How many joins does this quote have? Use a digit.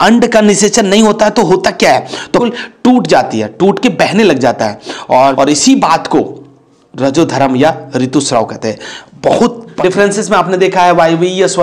3